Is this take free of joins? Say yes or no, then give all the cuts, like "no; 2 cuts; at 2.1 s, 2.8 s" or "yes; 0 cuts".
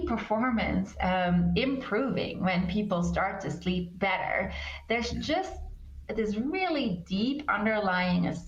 yes; 0 cuts